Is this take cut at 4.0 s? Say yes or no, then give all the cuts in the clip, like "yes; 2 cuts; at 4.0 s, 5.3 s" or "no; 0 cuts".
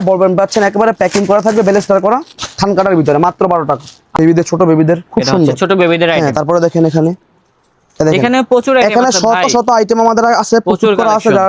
yes; 1 cut; at 4.0 s